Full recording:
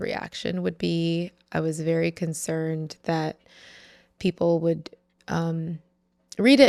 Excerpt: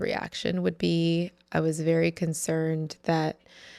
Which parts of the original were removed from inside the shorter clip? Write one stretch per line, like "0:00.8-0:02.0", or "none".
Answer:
none